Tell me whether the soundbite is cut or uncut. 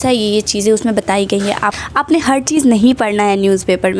cut